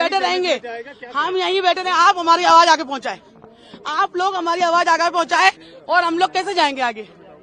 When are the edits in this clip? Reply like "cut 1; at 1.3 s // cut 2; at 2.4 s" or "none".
none

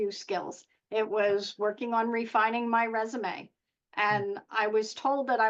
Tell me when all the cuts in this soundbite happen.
none

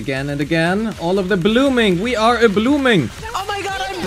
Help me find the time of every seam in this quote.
none

